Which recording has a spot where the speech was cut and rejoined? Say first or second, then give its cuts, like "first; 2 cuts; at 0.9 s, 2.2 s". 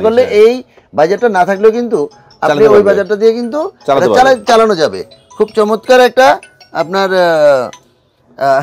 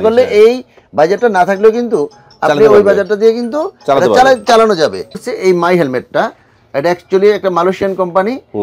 second; 1 cut; at 5.3 s